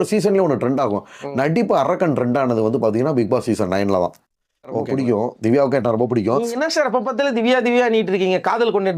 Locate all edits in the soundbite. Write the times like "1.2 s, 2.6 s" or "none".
4.9 s